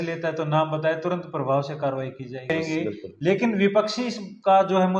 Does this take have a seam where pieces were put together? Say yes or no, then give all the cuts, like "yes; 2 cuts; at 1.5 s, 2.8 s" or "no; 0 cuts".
yes; 1 cut; at 2.5 s